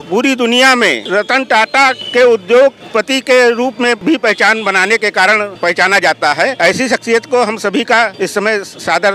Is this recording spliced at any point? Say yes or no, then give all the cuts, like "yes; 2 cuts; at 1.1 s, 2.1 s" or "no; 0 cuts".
yes; 7 cuts; at 1.0 s, 2.0 s, 2.8 s, 4.0 s, 5.5 s, 6.5 s, 8.1 s